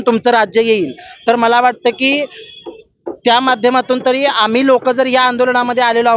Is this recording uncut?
yes; 0 cuts

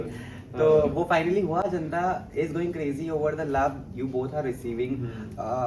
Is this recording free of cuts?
yes; 0 cuts

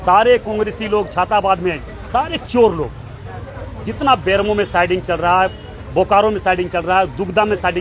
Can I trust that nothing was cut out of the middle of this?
yes; 0 cuts

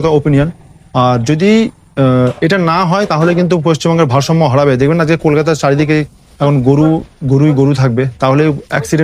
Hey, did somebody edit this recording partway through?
no; 0 cuts

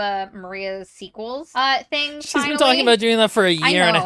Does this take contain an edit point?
no; 0 cuts

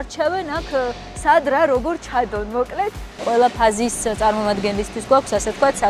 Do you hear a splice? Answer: yes; 1 cut; at 3.2 s

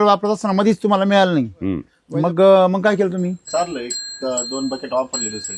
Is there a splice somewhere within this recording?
yes; 1 cut; at 3.4 s

